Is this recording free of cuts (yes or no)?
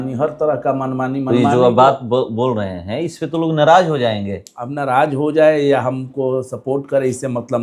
yes